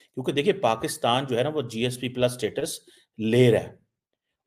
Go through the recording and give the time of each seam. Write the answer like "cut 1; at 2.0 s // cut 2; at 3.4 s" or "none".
none